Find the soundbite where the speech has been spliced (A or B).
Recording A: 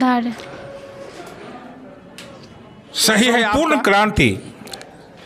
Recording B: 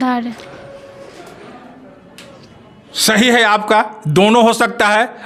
A